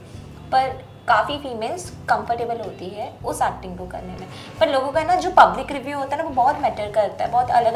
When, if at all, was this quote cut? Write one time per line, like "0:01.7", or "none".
none

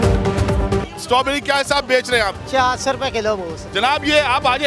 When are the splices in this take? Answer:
0:00.9
0:02.4
0:03.6

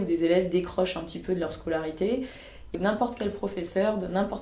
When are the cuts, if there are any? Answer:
0:02.7

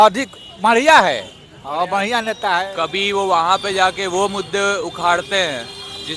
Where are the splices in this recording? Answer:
0:02.7

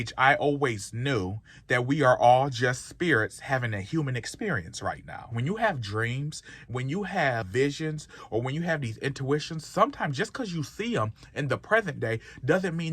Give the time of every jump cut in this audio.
0:05.4
0:07.5

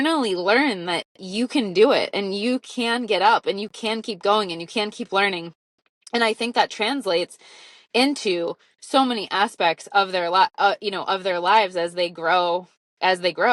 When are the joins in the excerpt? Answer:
none

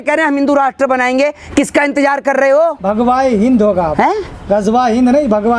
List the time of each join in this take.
0:02.8

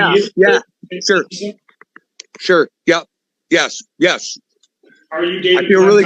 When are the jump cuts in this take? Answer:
none

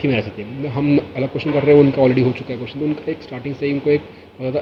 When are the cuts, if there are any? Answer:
none

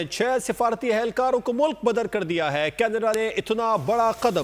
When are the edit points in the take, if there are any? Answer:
none

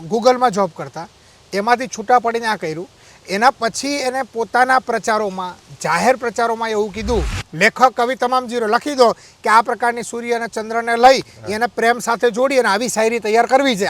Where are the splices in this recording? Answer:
0:07.4

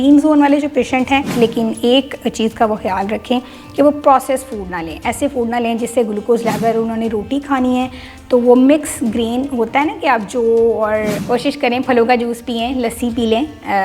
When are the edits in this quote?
0:01.3
0:06.5
0:11.2

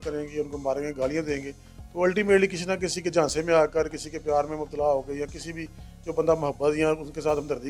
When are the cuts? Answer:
none

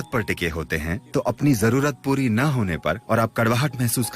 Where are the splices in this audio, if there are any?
0:01.0
0:03.0

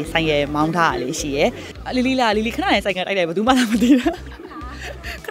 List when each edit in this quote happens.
0:01.7

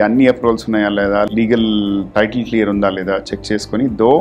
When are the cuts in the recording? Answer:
0:01.3

